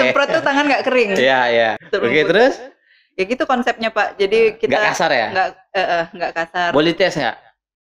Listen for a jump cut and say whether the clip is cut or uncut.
cut